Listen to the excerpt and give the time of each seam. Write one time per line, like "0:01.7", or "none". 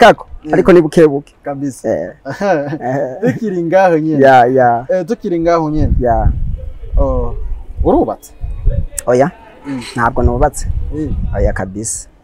none